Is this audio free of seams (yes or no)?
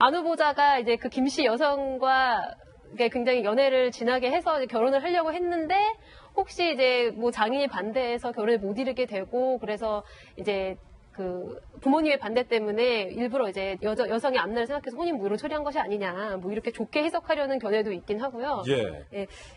no